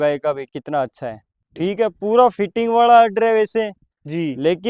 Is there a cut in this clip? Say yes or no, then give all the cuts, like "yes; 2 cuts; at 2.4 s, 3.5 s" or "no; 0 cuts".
yes; 1 cut; at 1.4 s